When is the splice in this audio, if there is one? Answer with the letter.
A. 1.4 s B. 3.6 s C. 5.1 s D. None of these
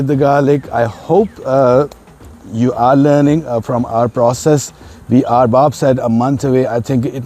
D